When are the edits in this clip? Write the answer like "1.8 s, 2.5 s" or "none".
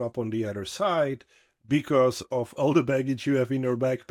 2.5 s